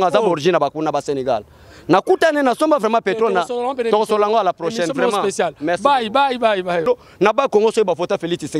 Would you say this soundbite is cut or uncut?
cut